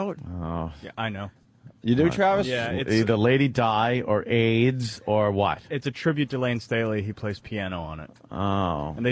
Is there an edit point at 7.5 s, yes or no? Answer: no